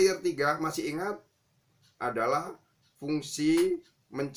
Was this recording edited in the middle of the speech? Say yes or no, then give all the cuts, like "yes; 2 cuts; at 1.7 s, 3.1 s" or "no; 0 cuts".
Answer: no; 0 cuts